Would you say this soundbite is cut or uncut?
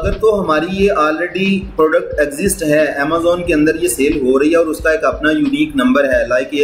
uncut